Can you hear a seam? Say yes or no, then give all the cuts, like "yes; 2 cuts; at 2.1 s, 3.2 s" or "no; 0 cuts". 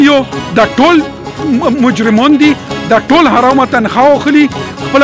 no; 0 cuts